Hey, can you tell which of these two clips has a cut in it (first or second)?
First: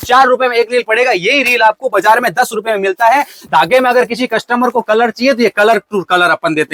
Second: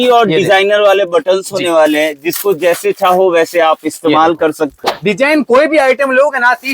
second